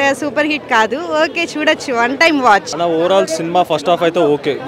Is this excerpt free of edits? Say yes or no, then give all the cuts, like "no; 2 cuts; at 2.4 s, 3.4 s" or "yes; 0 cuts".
no; 1 cut; at 2.7 s